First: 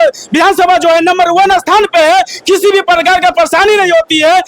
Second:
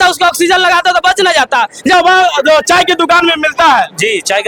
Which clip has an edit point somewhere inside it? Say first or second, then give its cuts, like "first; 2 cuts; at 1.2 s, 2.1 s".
second; 1 cut; at 1.9 s